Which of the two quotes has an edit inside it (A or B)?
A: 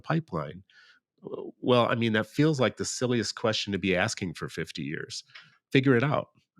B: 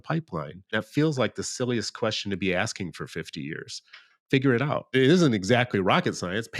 B